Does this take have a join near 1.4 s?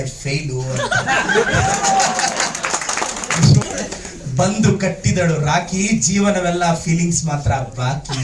no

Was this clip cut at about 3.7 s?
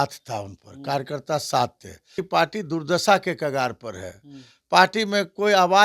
no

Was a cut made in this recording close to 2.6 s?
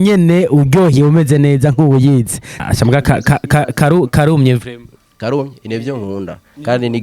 yes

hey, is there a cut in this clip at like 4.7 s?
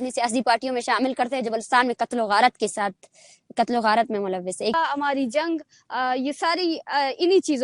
yes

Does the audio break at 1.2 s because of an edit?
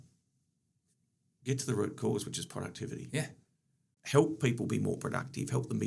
no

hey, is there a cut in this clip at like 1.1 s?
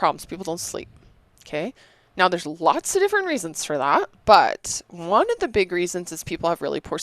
no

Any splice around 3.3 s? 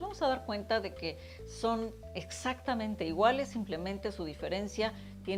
no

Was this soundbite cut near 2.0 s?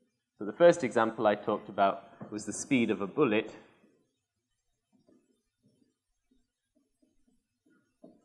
no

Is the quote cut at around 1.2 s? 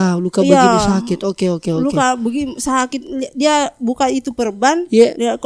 no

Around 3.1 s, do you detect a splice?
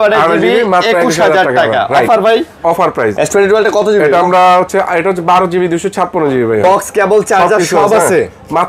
yes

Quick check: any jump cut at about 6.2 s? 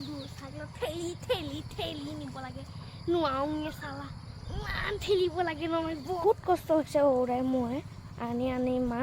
yes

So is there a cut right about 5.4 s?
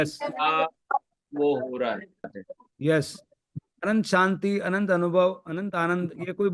no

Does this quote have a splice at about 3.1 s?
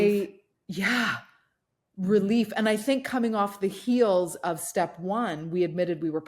no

